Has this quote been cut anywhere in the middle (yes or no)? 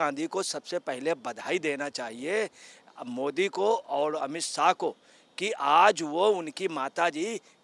no